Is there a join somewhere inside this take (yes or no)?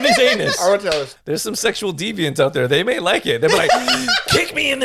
yes